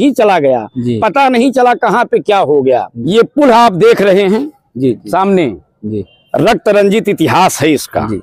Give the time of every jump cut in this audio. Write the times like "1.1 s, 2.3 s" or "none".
3.0 s